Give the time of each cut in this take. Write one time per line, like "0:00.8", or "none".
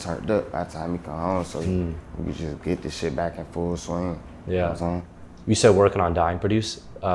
none

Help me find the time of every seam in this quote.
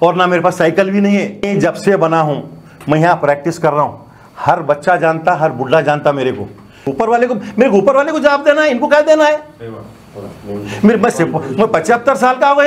0:01.5
0:06.8

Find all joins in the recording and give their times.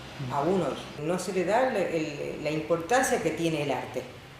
0:00.9

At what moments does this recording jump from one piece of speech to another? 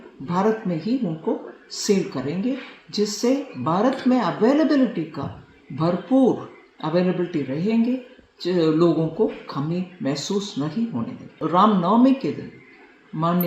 0:11.4

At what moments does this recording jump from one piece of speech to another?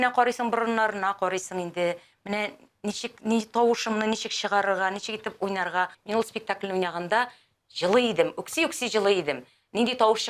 0:05.9

